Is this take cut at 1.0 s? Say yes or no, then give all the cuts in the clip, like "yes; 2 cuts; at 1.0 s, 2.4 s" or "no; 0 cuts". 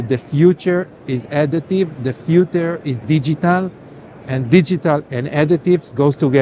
no; 0 cuts